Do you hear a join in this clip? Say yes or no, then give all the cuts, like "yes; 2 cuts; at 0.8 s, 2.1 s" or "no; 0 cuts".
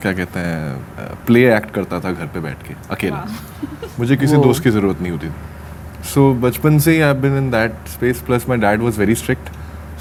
no; 0 cuts